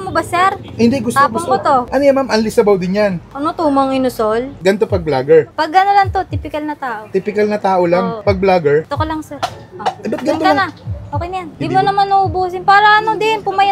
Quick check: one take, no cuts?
no; 3 cuts; at 4.5 s, 8.1 s, 11.5 s

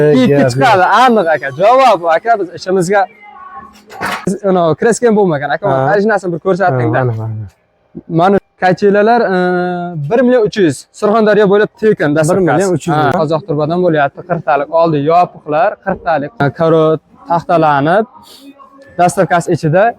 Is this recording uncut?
no; 4 cuts; at 4.3 s, 8.5 s, 13.1 s, 16.4 s

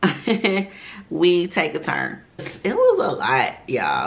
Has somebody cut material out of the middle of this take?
yes; 1 cut; at 2.5 s

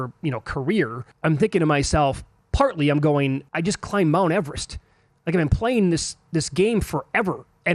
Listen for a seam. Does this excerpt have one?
yes; 2 cuts; at 1.0 s, 3.5 s

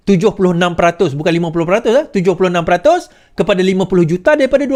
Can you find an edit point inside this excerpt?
no; 0 cuts

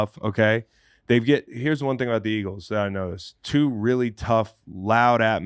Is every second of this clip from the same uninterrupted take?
yes; 0 cuts

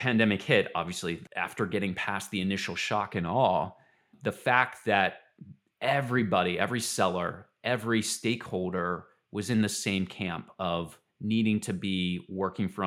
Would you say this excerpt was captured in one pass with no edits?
no; 1 cut; at 1.3 s

